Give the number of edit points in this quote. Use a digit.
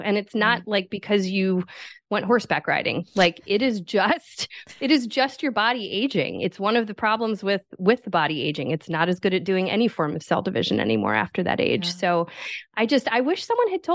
0